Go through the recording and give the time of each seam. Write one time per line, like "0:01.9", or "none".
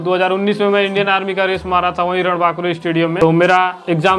0:03.1